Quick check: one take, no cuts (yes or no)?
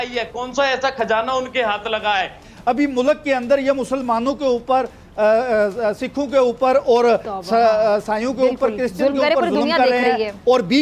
no